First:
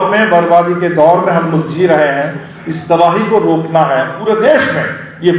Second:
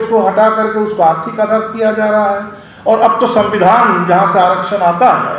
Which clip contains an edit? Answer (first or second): first